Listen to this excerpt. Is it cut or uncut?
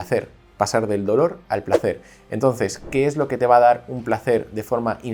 uncut